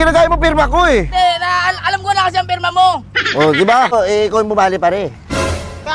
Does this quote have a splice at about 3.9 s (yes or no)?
yes